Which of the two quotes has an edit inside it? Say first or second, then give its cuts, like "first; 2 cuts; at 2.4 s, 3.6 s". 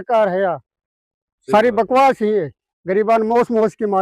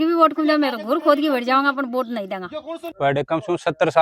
second; 1 cut; at 2.9 s